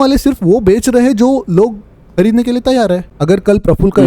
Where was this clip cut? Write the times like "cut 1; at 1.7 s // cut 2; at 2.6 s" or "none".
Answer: cut 1; at 3.1 s